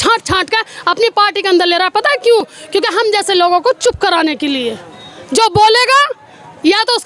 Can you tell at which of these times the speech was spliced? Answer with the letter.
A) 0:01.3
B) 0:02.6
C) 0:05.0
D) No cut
D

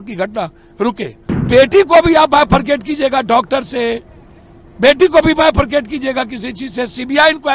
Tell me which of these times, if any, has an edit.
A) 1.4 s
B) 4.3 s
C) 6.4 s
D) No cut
A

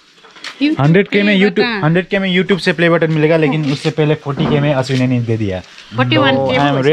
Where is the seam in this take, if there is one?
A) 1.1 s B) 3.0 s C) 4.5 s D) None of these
D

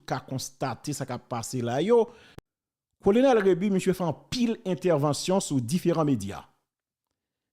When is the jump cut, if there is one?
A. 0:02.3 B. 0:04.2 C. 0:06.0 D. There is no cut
A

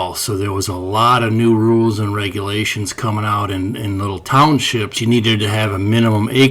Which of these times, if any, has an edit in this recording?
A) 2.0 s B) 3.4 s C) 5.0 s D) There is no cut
C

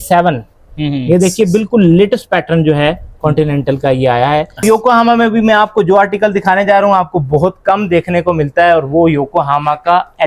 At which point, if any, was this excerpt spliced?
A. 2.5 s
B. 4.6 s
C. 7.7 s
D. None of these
B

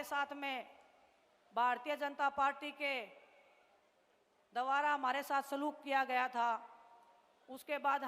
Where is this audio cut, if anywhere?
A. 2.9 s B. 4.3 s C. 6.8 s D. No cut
D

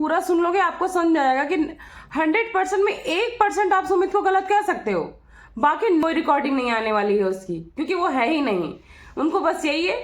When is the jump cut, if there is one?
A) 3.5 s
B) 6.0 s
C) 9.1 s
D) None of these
B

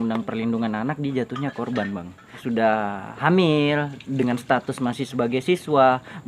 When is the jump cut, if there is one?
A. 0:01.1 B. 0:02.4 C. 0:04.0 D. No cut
B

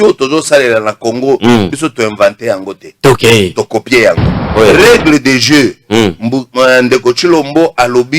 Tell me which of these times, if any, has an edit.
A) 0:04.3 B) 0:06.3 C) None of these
A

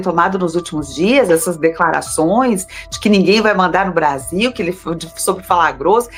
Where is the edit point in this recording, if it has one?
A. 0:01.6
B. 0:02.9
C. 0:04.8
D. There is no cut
D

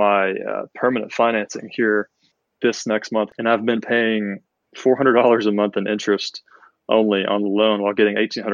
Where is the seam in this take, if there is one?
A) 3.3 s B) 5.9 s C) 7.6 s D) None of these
A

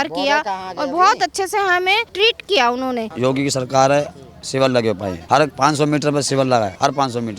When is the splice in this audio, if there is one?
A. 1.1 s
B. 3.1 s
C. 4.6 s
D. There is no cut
B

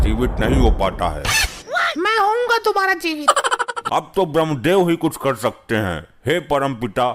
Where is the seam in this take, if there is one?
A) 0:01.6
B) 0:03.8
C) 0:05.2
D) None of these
B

